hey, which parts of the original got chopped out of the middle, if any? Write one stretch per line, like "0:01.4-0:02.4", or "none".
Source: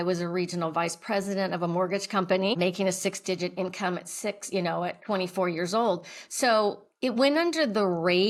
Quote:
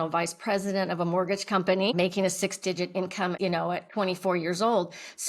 0:04.0-0:04.5